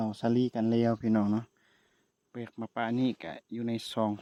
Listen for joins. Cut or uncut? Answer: uncut